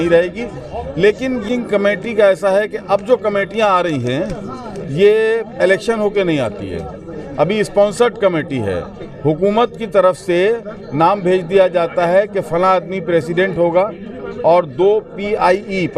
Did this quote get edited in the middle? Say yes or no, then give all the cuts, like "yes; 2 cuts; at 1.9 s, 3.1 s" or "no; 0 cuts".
no; 0 cuts